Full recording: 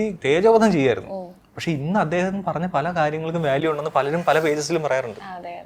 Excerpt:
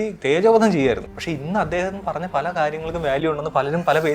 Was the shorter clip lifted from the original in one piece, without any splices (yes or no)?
no